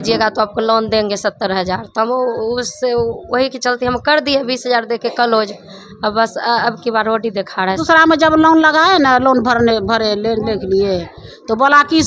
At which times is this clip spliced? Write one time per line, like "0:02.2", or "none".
0:07.8